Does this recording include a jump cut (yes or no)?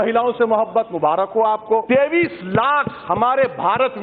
yes